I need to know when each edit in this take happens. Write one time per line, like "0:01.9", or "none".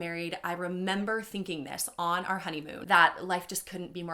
0:02.7